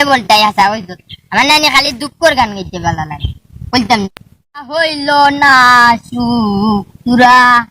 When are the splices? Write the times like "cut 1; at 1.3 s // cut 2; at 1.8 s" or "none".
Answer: cut 1; at 4.7 s